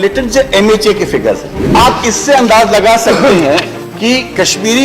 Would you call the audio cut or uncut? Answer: cut